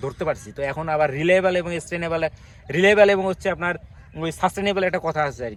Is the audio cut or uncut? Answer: uncut